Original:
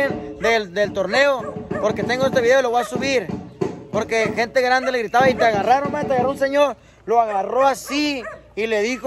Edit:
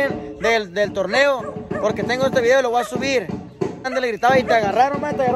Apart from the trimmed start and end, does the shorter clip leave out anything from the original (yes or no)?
yes